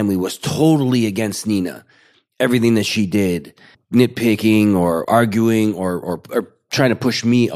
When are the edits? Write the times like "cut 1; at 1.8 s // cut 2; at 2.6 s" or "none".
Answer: cut 1; at 5.0 s